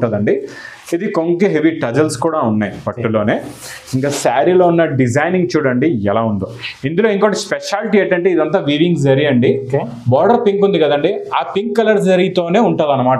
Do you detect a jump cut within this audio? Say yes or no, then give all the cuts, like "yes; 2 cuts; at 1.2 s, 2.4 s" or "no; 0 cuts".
no; 0 cuts